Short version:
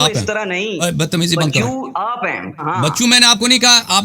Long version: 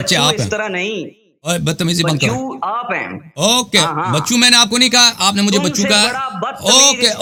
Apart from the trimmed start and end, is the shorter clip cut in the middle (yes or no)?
yes